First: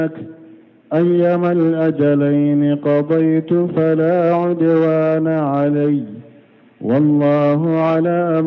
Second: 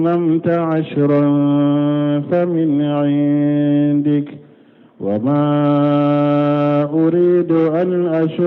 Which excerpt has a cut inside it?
second; 1 cut; at 2.0 s

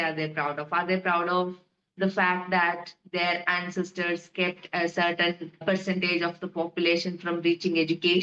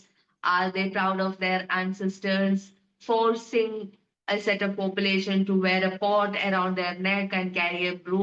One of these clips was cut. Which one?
first; 1 cut; at 5.5 s

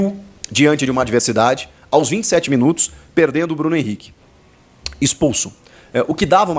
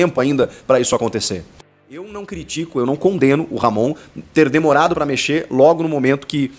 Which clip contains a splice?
second; 1 cut; at 1.7 s

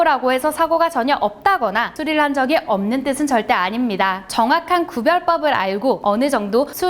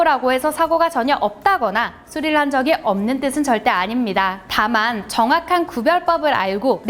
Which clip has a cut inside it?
first; 3 cuts; at 1.9 s, 4.2 s, 6.0 s

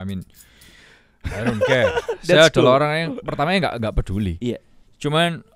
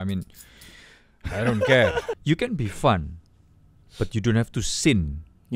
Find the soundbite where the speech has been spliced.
second; 1 cut; at 2.1 s

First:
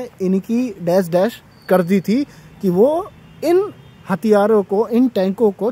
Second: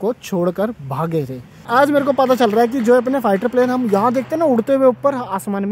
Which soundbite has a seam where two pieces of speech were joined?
second; 1 cut; at 1.5 s

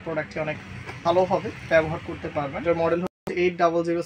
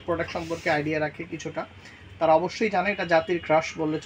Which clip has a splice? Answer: first; 1 cut; at 2.6 s

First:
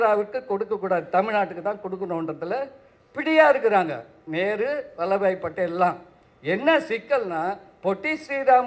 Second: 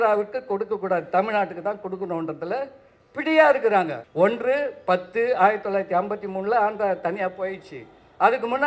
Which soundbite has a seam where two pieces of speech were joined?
second; 1 cut; at 4.0 s

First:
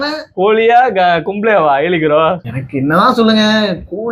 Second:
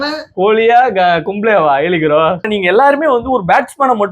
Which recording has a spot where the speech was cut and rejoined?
second; 1 cut; at 2.5 s

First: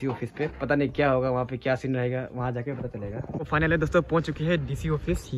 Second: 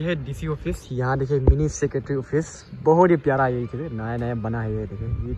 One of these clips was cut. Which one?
first; 1 cut; at 3.4 s

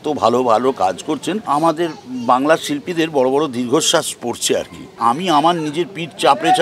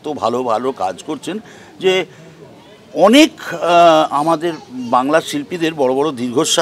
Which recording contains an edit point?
first; 2 cuts; at 1.5 s, 4.9 s

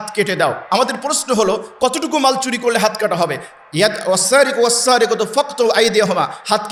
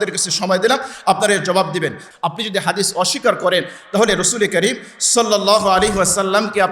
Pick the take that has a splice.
second; 1 cut; at 2.0 s

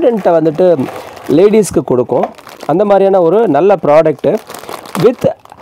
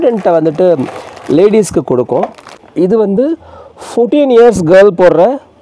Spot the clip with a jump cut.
second; 1 cut; at 2.1 s

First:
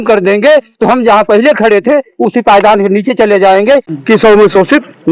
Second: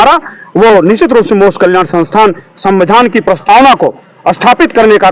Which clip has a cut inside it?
first; 1 cut; at 3.9 s

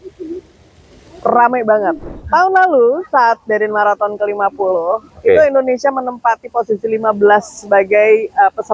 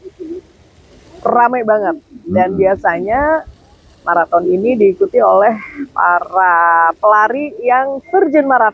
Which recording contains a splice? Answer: first; 1 cut; at 2.1 s

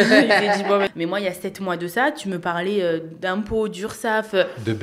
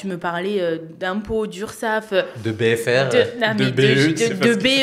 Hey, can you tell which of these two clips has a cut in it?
first; 1 cut; at 0.9 s

